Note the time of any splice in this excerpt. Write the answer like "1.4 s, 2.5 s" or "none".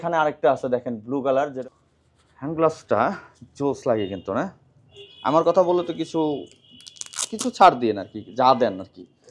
1.6 s, 5.1 s